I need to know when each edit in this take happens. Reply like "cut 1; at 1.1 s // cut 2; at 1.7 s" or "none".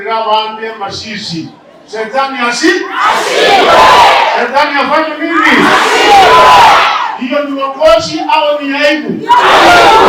none

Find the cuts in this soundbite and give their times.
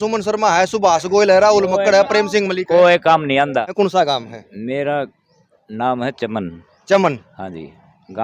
cut 1; at 3.7 s

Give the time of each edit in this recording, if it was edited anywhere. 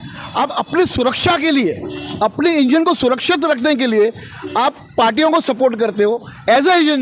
none

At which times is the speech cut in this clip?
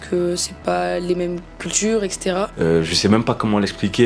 cut 1; at 2.5 s

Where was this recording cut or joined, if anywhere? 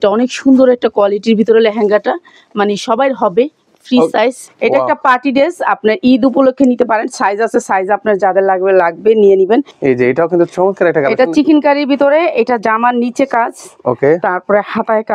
cut 1; at 4.4 s // cut 2; at 9.7 s

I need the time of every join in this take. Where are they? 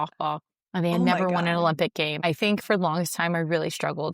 cut 1; at 2.2 s

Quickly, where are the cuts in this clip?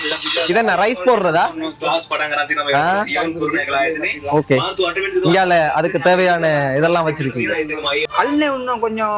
cut 1; at 8.1 s

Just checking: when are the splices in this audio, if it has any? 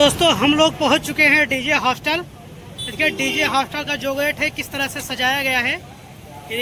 none

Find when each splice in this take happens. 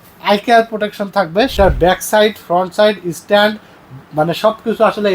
cut 1; at 1.6 s

